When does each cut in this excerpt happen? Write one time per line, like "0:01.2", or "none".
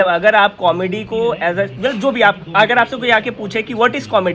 none